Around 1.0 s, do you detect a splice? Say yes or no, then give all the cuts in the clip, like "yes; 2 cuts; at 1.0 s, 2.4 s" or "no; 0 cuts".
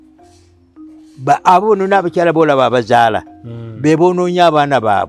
no; 0 cuts